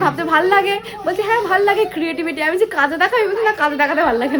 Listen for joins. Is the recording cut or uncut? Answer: uncut